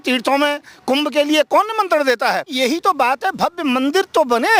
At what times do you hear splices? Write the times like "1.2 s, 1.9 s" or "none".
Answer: 2.5 s